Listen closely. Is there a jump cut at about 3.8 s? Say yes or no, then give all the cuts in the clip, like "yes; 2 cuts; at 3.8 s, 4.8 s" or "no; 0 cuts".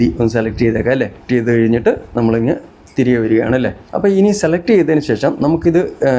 yes; 2 cuts; at 1.2 s, 3.8 s